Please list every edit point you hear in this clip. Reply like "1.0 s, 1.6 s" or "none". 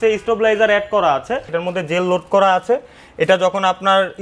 1.5 s